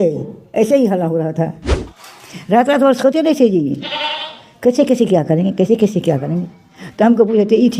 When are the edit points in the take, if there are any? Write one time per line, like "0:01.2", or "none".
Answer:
0:01.7